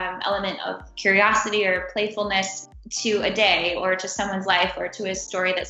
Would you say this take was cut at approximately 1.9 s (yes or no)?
no